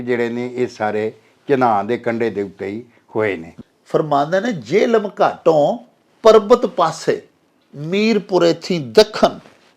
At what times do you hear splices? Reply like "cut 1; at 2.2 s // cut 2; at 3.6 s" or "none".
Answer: cut 1; at 3.5 s

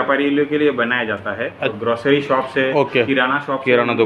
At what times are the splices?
cut 1; at 1.6 s

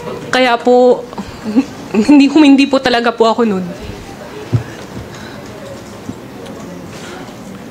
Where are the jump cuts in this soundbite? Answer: none

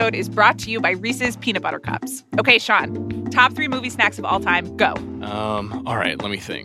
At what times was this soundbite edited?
none

